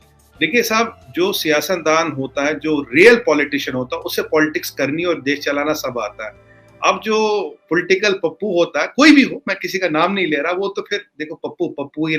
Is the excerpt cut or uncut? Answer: uncut